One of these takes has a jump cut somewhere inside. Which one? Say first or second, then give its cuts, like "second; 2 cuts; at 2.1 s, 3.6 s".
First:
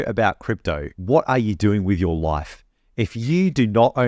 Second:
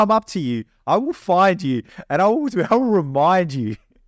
first; 1 cut; at 0.9 s